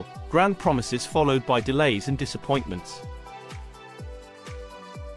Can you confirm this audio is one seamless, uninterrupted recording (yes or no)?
no